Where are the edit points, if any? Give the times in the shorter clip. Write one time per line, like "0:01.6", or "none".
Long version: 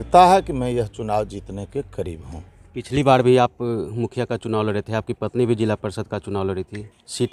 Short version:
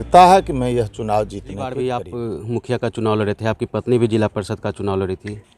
0:01.7